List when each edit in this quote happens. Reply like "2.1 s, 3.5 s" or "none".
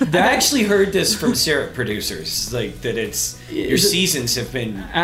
none